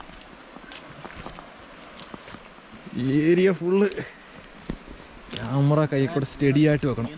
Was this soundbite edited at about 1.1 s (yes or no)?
no